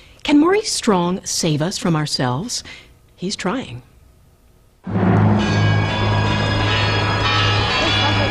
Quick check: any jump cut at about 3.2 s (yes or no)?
yes